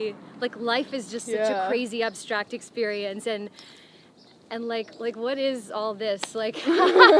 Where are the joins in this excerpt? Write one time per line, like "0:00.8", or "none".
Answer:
none